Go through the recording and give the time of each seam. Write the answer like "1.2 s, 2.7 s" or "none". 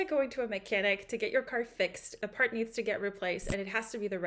2.1 s